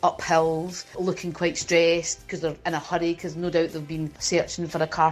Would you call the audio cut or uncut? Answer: cut